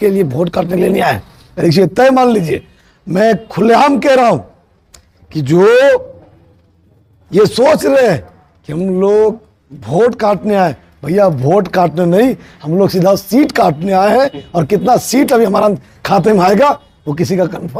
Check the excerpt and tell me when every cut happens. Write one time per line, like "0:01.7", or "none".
none